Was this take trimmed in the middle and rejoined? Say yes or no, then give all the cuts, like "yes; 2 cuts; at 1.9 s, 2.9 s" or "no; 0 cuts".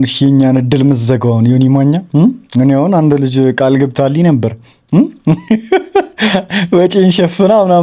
no; 0 cuts